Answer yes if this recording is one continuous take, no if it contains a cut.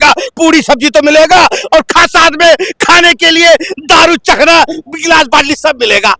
yes